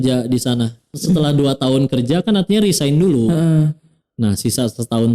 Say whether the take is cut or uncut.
cut